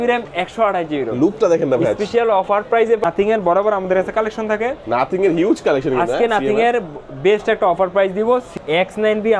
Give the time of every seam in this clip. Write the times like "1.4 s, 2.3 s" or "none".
3.0 s, 8.5 s